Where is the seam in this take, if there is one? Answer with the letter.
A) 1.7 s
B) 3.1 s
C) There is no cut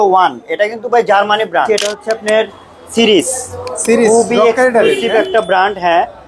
A